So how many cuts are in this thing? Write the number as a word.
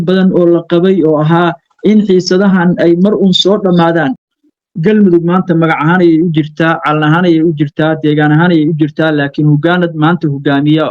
one